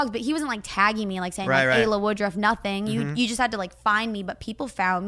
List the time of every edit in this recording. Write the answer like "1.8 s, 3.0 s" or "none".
none

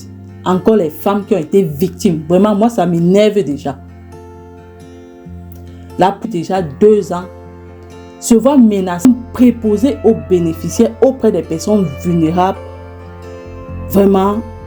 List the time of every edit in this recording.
6.2 s, 9.0 s

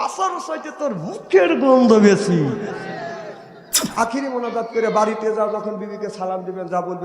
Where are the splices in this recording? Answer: 3.8 s

